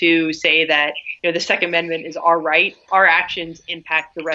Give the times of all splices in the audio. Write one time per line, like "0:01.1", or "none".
0:01.0
0:02.9